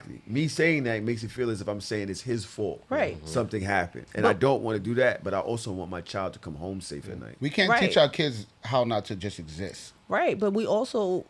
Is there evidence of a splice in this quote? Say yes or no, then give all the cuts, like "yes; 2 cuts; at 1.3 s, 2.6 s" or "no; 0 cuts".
no; 0 cuts